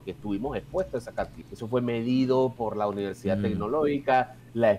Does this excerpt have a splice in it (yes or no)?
yes